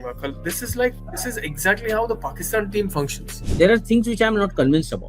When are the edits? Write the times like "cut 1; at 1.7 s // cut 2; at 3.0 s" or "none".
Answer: cut 1; at 3.4 s